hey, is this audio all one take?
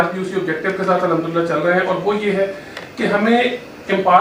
yes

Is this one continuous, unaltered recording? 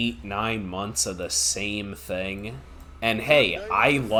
yes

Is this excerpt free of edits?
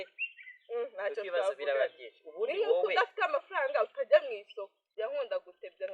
no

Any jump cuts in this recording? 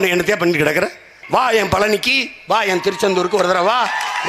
yes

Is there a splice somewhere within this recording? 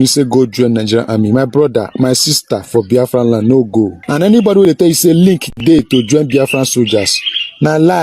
yes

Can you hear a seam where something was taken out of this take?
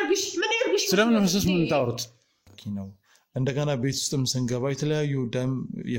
yes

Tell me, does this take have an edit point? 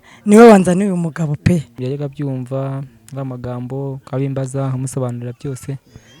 yes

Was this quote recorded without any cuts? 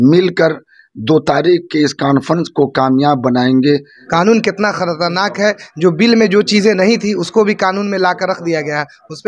no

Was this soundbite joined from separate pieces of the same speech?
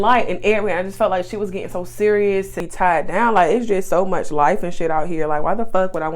yes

